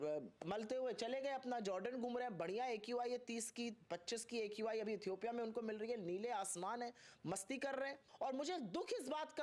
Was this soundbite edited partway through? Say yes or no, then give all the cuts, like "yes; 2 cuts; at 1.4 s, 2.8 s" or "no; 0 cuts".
yes; 1 cut; at 8.0 s